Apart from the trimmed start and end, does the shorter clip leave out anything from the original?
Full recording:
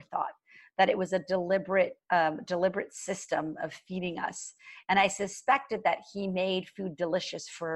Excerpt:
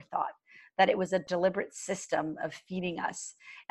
yes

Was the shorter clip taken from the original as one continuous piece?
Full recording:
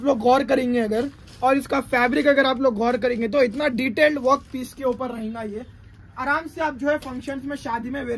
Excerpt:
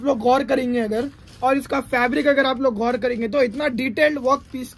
yes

